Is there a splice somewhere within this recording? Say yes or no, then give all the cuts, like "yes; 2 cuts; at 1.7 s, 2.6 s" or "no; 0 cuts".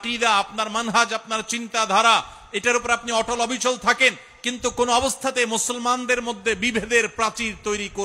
no; 0 cuts